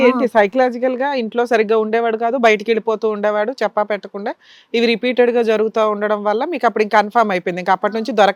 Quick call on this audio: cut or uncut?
uncut